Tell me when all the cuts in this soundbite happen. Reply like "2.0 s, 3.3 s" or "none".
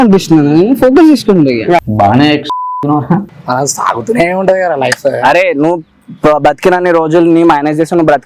1.9 s, 3.2 s